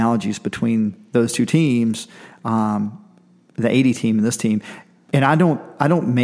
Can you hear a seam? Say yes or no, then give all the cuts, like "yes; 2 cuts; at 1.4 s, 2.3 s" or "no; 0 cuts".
no; 0 cuts